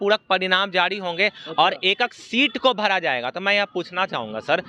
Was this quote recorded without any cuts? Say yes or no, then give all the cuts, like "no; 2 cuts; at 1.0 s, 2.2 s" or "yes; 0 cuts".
yes; 0 cuts